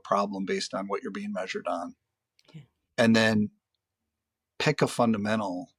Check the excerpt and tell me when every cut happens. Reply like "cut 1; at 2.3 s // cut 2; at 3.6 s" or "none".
none